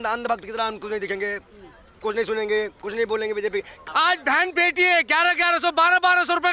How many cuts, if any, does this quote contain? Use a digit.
1